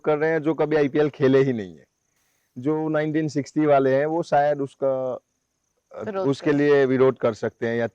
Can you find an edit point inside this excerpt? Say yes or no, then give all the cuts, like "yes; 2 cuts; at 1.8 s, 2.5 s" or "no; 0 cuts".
no; 0 cuts